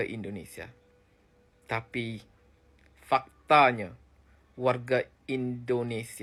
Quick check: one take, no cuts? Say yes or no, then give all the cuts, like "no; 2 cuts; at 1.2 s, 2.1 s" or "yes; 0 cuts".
yes; 0 cuts